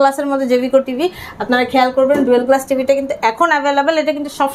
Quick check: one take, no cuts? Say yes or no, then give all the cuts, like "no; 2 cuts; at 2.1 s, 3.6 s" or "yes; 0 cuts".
yes; 0 cuts